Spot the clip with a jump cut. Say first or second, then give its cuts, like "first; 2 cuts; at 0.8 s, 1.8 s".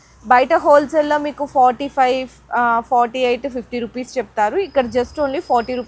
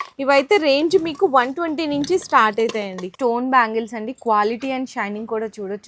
second; 1 cut; at 3.1 s